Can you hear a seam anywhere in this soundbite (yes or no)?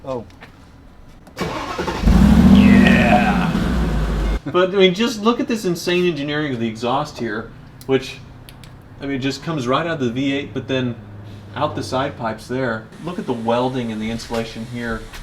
yes